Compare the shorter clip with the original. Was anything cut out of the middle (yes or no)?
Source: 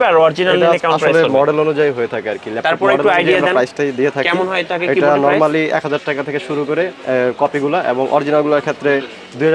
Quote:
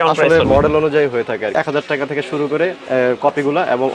yes